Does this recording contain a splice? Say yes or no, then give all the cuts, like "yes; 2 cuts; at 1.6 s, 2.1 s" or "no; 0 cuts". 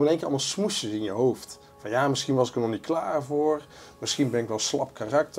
no; 0 cuts